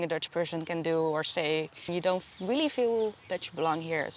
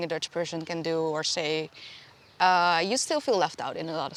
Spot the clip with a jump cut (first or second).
first